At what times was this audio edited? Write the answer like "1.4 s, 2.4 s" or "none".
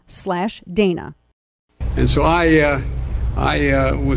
1.9 s